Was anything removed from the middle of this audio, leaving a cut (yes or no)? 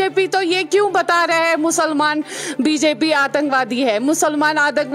no